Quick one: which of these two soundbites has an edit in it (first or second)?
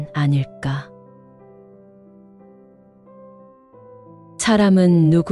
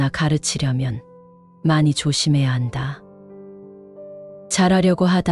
first